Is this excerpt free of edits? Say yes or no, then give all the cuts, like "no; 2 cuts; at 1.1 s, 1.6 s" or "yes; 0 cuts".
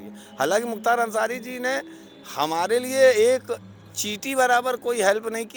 yes; 0 cuts